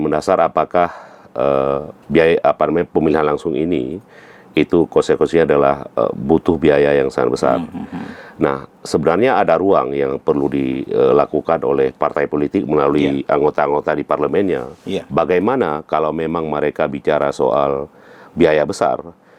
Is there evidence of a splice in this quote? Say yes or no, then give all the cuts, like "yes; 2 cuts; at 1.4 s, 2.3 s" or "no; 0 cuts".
no; 0 cuts